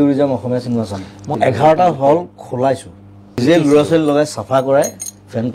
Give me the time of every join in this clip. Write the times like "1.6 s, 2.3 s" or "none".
1.3 s, 3.4 s